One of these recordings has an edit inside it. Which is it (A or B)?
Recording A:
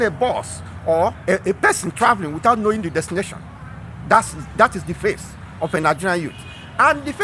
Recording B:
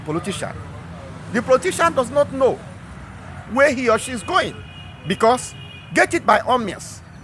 A